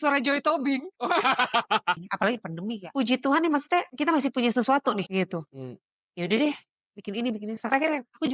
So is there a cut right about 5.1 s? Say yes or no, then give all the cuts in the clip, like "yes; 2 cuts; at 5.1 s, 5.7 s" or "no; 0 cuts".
yes; 3 cuts; at 2.5 s, 3.9 s, 5.1 s